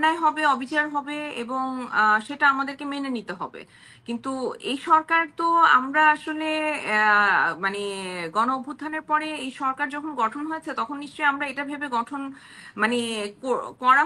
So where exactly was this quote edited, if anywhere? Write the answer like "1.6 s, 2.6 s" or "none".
none